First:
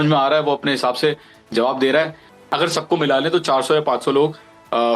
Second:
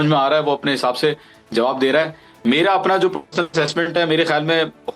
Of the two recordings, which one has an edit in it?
first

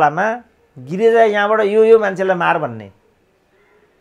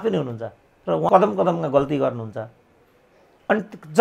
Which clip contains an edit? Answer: second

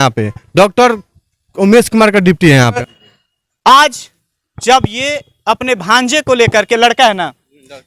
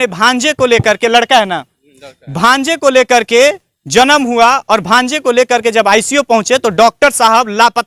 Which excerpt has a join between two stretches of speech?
first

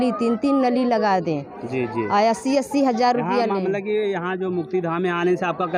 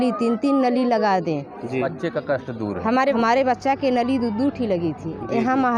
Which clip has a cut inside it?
second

